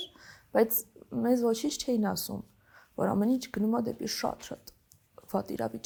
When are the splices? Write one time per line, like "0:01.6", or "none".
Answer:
none